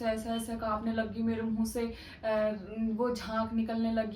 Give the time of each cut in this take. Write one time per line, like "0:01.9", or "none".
none